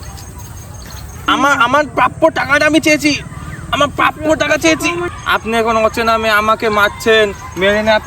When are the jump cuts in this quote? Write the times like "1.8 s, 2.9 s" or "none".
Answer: 1.2 s, 5.1 s